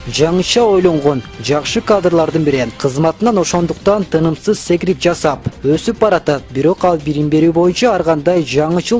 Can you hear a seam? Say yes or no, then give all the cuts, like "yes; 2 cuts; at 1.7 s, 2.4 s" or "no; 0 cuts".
yes; 1 cut; at 3.2 s